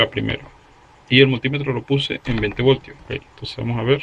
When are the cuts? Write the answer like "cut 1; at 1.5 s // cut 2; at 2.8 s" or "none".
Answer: cut 1; at 3.0 s